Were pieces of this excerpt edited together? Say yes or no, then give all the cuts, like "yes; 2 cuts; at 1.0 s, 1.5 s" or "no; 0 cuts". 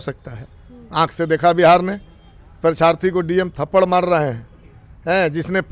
no; 0 cuts